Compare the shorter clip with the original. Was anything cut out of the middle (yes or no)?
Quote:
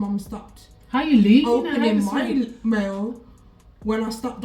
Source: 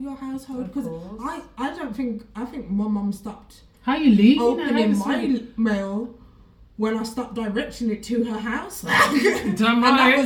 no